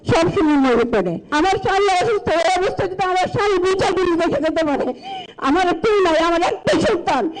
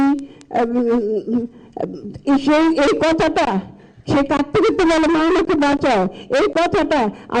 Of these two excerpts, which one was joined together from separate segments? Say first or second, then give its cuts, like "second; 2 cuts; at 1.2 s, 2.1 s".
first; 1 cut; at 1.2 s